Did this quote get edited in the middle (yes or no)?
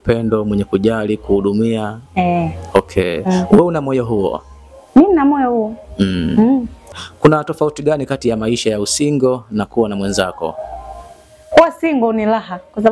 yes